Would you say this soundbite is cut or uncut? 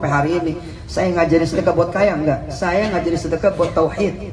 uncut